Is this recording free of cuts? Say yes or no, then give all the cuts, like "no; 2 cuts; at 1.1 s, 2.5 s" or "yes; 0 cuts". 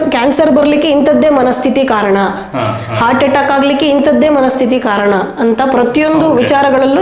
yes; 0 cuts